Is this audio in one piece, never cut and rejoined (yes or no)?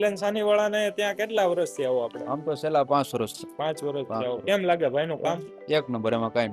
yes